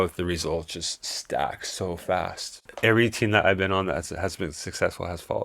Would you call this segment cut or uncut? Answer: cut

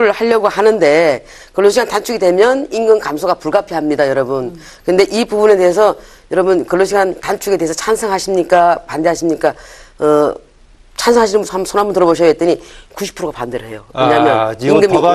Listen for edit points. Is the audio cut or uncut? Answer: cut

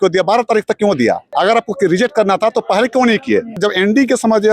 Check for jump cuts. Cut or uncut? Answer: cut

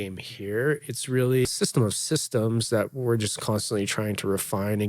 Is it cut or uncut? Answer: cut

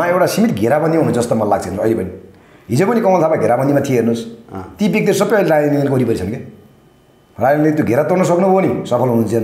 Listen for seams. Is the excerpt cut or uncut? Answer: uncut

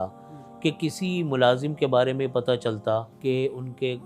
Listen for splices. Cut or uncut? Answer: cut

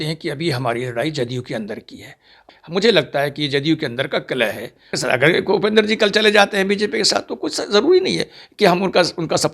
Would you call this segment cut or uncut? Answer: cut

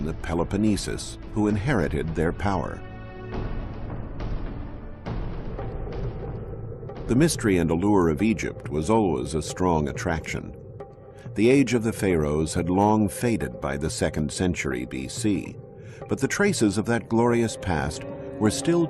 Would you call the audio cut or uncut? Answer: cut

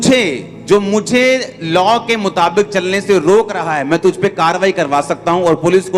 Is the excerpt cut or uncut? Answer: uncut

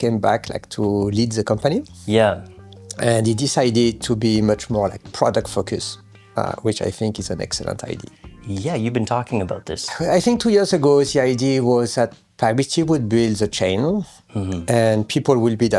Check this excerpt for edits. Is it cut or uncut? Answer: uncut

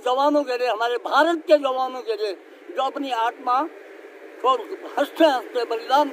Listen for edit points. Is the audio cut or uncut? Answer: uncut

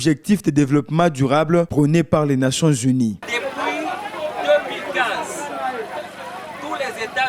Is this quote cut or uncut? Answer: cut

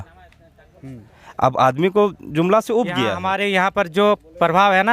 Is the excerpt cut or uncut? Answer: cut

